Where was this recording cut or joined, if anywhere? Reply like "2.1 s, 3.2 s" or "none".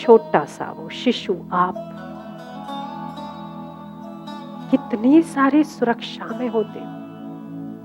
none